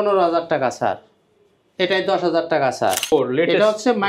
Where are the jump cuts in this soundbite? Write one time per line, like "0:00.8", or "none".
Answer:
0:03.1

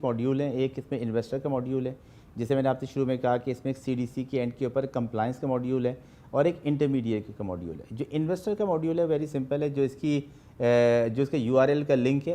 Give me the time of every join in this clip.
none

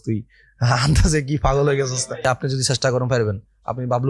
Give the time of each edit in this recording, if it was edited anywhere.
0:02.2

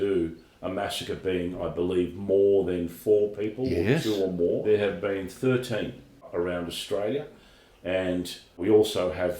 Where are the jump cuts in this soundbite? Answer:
0:04.7
0:06.3
0:08.6

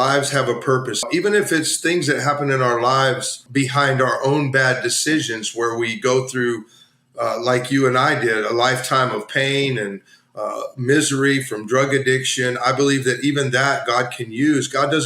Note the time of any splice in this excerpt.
0:01.1
0:03.4

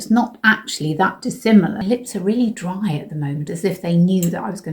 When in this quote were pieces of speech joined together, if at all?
0:01.8
0:03.5

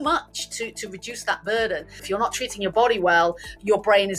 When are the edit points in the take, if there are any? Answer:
0:02.0

